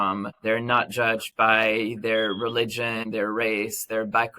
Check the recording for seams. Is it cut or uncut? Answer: cut